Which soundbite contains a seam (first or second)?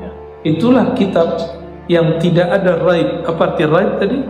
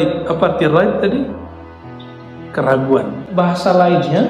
second